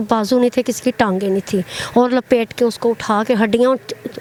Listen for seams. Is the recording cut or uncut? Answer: uncut